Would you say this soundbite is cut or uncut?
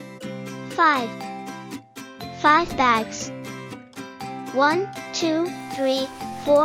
uncut